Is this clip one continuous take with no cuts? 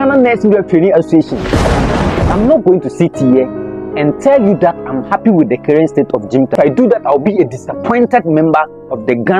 yes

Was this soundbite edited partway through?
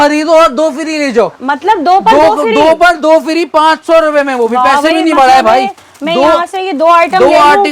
no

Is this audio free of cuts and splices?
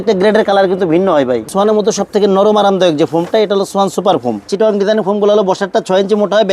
no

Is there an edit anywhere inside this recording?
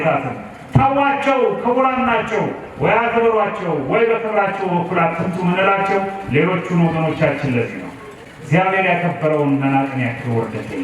no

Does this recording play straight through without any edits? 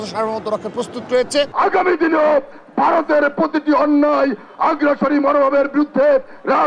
no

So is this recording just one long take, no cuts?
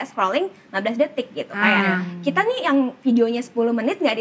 yes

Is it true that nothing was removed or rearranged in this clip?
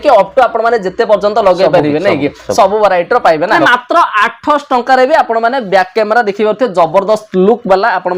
no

